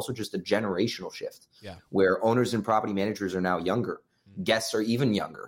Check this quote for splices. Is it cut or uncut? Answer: uncut